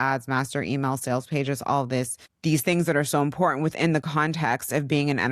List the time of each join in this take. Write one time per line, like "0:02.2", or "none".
0:02.2